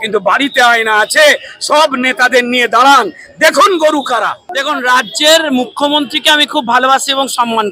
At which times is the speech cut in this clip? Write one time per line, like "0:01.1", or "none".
0:04.5